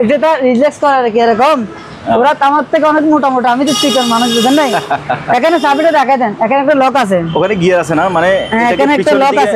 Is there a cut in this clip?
no; 0 cuts

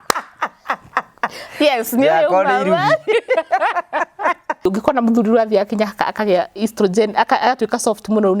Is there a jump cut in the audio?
yes; 1 cut; at 4.7 s

